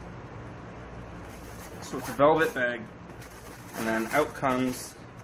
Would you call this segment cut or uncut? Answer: uncut